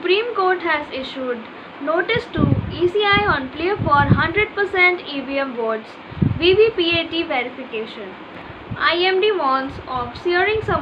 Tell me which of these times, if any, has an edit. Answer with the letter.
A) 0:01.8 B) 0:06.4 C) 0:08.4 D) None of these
C